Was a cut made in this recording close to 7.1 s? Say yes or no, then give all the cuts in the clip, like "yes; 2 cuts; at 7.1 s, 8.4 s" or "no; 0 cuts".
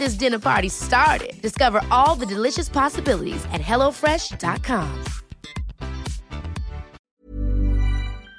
yes; 1 cut; at 7.1 s